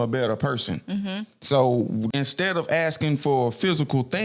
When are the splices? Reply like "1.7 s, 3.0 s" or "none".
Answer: 2.1 s